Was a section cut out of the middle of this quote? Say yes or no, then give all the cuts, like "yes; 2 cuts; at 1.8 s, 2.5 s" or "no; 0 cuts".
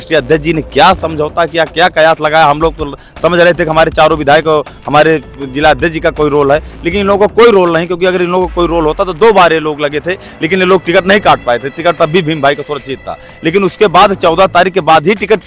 no; 0 cuts